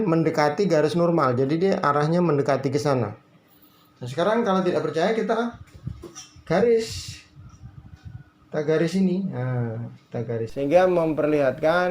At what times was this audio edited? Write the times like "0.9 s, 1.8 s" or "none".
10.5 s